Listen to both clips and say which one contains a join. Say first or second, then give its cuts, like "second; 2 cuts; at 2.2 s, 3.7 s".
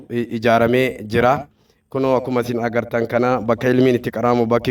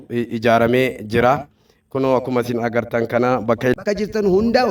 second; 1 cut; at 3.8 s